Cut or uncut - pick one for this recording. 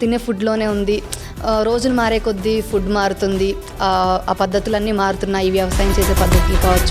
uncut